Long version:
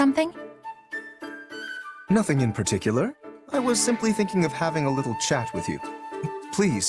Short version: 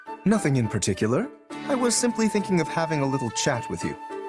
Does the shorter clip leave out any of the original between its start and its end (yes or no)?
no